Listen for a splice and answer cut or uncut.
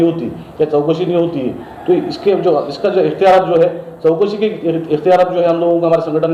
uncut